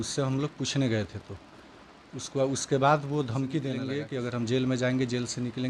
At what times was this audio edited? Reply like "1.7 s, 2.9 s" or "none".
3.9 s